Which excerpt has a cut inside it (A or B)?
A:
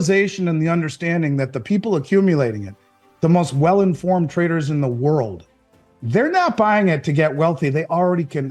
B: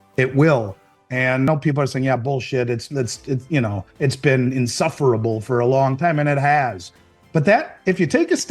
B